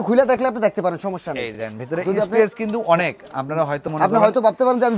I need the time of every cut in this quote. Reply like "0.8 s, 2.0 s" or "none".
none